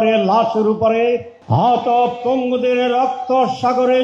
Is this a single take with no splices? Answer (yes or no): no